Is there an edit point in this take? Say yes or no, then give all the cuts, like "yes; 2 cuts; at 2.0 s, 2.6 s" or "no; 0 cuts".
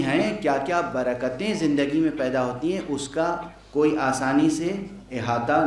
no; 0 cuts